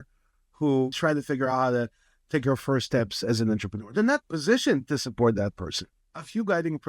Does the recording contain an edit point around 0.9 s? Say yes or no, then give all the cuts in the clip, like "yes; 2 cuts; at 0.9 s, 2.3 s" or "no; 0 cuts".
yes; 2 cuts; at 0.9 s, 6.0 s